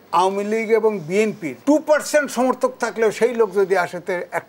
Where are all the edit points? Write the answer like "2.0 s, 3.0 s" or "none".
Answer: 1.5 s